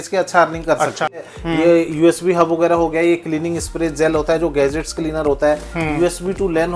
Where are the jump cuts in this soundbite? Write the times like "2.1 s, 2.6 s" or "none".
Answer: 1.2 s